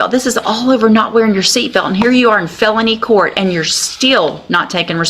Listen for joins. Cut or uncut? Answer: uncut